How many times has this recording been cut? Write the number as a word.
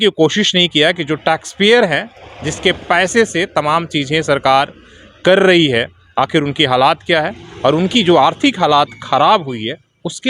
zero